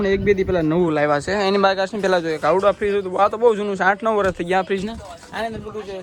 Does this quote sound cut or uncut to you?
uncut